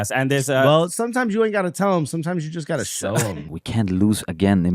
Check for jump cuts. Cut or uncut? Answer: cut